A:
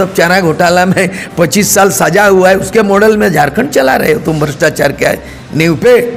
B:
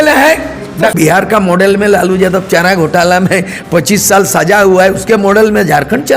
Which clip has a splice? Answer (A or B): B